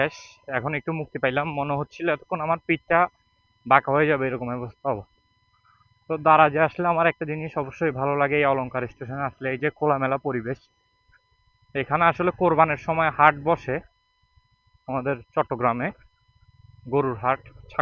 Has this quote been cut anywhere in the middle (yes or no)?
no